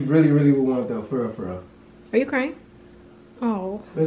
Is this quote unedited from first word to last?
yes; 0 cuts

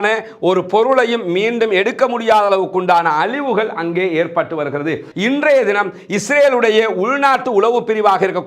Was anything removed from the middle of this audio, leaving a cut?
yes; 1 cut; at 5.1 s

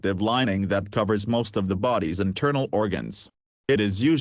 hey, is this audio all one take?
no; 1 cut; at 3.3 s

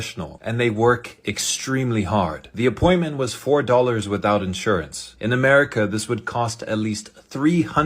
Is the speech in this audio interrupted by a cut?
yes; 1 cut; at 2.5 s

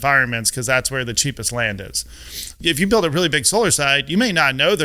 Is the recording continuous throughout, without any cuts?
no; 1 cut; at 2.5 s

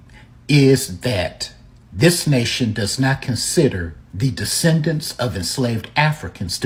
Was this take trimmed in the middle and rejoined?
no; 0 cuts

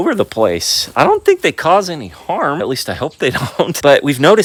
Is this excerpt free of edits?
yes; 0 cuts

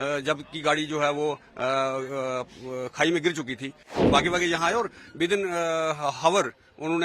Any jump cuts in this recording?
yes; 1 cut; at 3.8 s

